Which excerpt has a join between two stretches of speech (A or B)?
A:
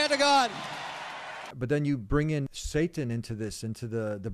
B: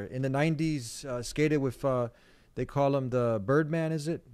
A